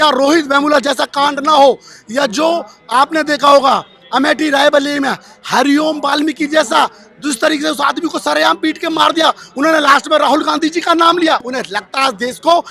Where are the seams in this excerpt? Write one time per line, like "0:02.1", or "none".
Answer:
none